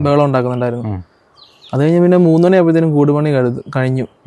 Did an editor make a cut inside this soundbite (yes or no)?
no